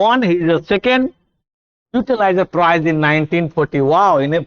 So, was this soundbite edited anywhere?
no; 0 cuts

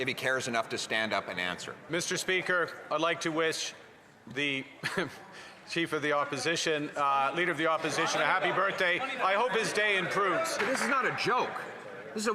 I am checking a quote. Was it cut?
yes; 2 cuts; at 1.7 s, 10.6 s

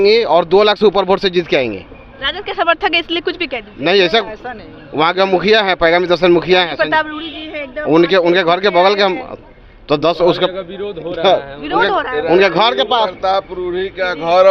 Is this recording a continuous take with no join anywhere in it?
yes; 0 cuts

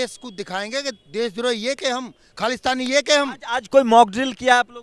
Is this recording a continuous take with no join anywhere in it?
yes; 0 cuts

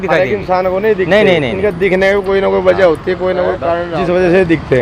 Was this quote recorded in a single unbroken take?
no; 1 cut; at 3.8 s

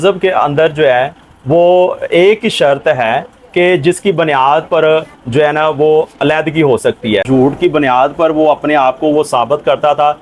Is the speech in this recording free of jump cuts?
no; 1 cut; at 7.3 s

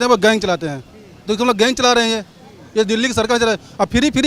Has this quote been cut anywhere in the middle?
no; 0 cuts

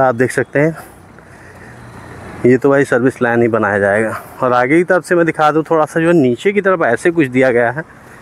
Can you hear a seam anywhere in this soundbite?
no; 0 cuts

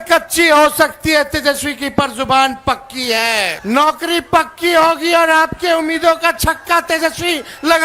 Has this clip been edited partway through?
yes; 1 cut; at 3.6 s

